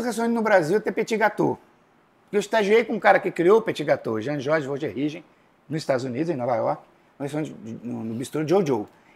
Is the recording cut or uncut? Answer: uncut